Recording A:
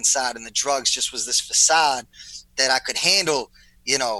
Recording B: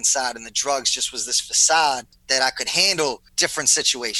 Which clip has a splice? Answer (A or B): B